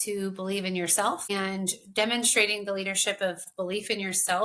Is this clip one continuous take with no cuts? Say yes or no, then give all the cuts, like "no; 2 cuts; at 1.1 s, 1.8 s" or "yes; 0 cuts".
no; 2 cuts; at 1.3 s, 3.5 s